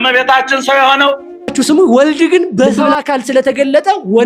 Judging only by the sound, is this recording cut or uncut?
cut